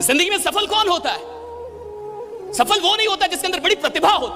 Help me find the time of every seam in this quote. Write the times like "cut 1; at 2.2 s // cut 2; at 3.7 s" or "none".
none